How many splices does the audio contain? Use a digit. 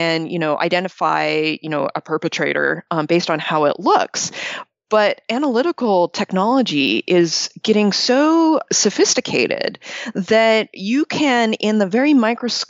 0